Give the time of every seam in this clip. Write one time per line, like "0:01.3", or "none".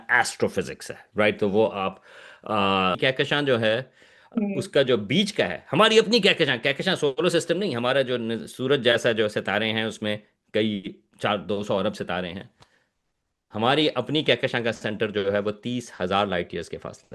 0:03.0

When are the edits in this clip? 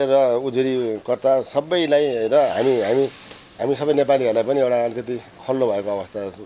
none

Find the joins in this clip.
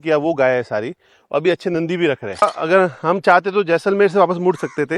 0:02.4

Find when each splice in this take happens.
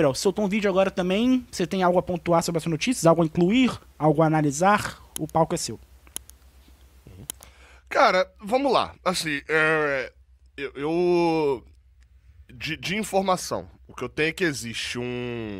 none

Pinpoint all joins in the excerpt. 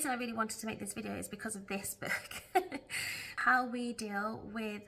0:03.3

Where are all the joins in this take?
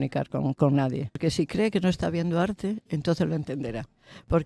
0:01.2

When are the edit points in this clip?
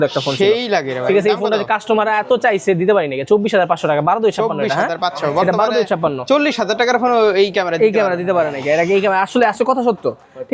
none

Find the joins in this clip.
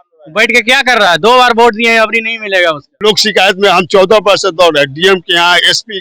0:02.9

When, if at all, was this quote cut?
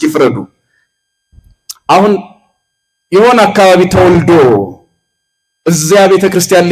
none

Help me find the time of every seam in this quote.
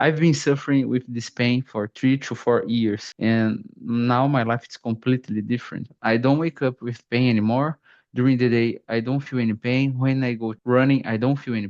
0:05.9

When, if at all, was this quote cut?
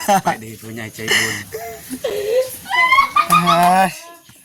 none

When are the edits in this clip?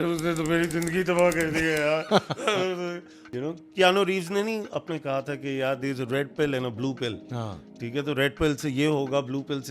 0:03.2

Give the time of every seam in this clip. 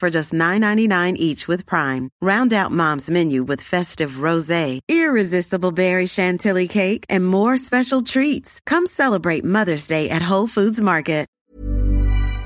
0:11.4

